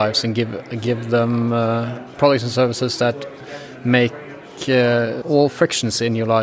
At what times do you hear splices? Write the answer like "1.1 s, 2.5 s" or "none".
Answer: 5.2 s